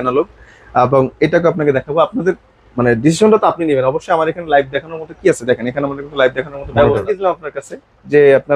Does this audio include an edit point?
yes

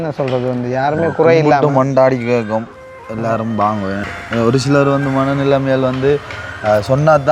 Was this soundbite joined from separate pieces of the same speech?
yes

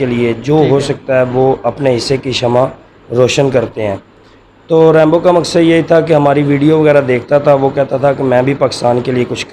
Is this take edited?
no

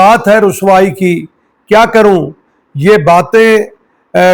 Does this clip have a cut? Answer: no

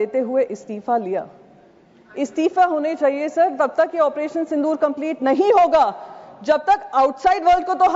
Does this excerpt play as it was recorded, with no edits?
yes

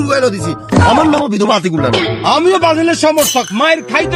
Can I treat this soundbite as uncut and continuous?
yes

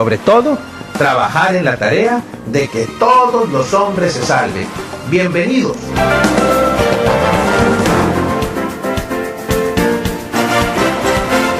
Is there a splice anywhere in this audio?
no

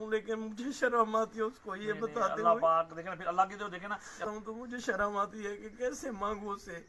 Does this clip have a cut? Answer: yes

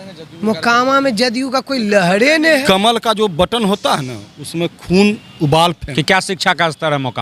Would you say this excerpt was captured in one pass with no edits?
no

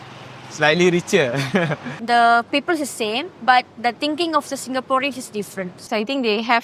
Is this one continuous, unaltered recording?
no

